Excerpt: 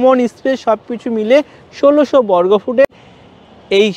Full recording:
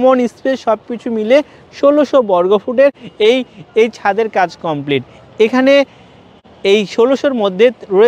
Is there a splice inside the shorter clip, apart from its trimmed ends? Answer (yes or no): yes